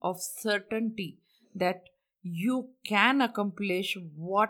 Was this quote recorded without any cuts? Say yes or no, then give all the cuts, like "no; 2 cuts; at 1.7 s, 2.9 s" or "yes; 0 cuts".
yes; 0 cuts